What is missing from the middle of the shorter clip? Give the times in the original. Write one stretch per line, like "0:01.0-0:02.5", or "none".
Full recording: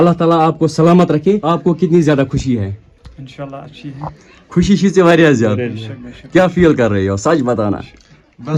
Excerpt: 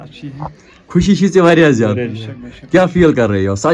none